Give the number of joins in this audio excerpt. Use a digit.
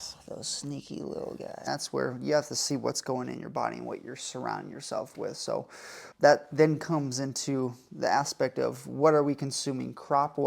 1